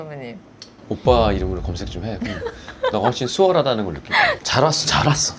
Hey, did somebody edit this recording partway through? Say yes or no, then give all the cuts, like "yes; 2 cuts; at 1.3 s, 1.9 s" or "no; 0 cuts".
no; 0 cuts